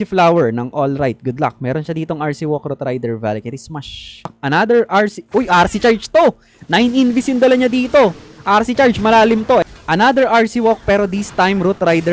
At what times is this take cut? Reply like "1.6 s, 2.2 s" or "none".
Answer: 4.4 s, 9.7 s